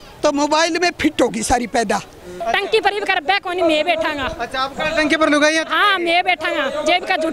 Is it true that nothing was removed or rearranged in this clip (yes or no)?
no